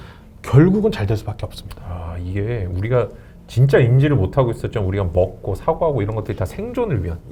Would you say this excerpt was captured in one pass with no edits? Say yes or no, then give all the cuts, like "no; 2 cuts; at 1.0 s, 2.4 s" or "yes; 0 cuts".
yes; 0 cuts